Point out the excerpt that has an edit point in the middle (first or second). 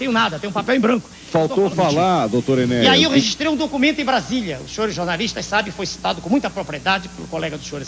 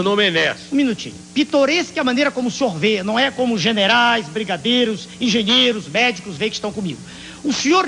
first